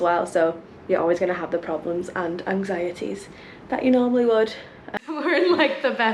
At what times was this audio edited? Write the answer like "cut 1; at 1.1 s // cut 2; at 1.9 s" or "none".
cut 1; at 4.9 s